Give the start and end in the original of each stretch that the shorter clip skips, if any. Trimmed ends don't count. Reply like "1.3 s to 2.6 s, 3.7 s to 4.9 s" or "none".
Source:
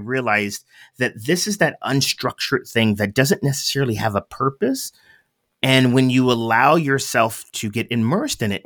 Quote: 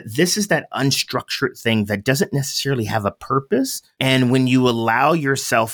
4.9 s to 5.5 s